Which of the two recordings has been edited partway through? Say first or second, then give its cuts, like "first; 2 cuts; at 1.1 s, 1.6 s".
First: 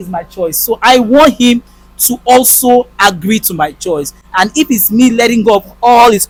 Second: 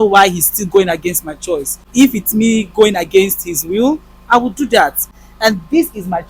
second; 2 cuts; at 1.8 s, 5.1 s